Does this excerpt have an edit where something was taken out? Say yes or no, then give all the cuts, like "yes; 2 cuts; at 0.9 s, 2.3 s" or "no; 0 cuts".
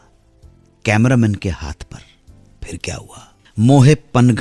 yes; 1 cut; at 3.4 s